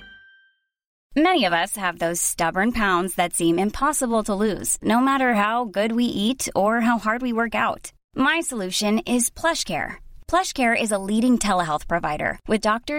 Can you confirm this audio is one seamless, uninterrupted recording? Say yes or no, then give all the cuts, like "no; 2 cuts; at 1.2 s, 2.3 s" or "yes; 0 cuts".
no; 1 cut; at 1.0 s